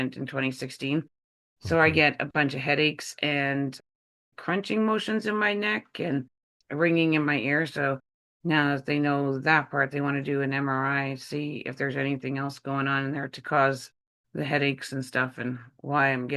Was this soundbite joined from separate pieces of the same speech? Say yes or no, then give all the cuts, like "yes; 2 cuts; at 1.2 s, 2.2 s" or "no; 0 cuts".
no; 0 cuts